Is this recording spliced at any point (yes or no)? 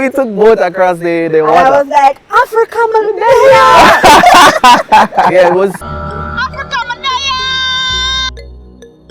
yes